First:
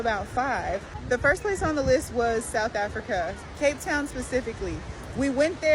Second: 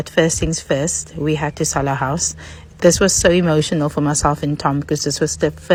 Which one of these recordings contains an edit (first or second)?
first